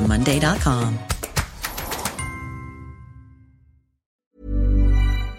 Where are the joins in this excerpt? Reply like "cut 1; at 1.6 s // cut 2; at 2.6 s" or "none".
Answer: cut 1; at 4.2 s